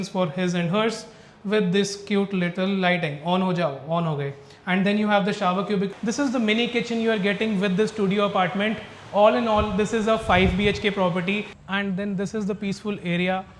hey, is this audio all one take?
no; 2 cuts; at 5.9 s, 11.5 s

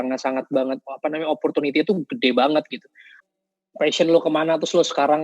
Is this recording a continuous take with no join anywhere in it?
no; 1 cut; at 3.2 s

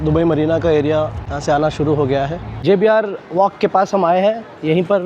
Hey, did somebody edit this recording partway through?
yes; 2 cuts; at 1.2 s, 2.5 s

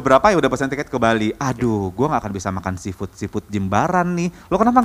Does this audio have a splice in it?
no; 0 cuts

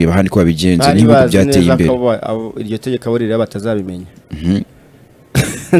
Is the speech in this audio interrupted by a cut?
no; 0 cuts

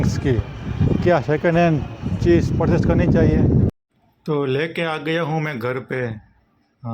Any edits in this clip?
yes; 1 cut; at 3.7 s

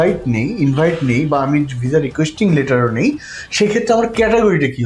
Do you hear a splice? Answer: no; 0 cuts

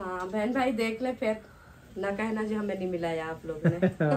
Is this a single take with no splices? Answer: yes; 0 cuts

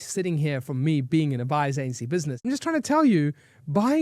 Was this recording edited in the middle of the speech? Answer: yes; 1 cut; at 2.4 s

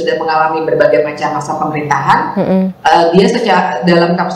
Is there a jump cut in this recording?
no; 0 cuts

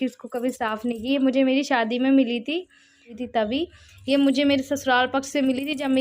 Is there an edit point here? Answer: yes; 1 cut; at 3.2 s

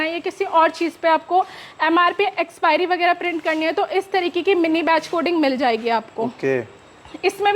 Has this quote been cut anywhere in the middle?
no; 0 cuts

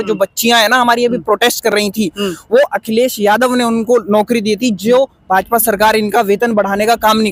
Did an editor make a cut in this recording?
no; 0 cuts

